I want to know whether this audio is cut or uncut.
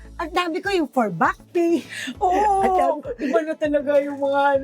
uncut